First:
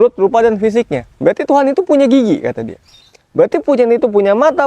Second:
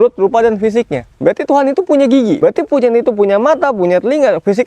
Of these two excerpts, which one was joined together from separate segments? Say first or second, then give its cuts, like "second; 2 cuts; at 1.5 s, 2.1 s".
second; 1 cut; at 2.4 s